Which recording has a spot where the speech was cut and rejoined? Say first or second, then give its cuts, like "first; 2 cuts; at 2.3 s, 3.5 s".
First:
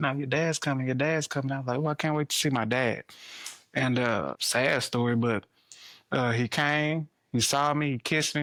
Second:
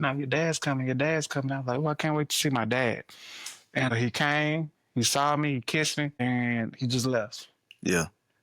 second; 2 cuts; at 3.9 s, 6.2 s